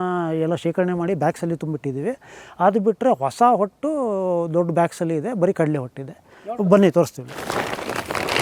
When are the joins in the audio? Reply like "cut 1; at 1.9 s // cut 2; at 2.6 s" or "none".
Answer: none